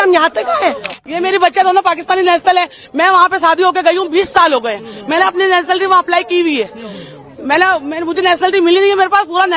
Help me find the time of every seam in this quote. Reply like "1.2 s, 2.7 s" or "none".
1.0 s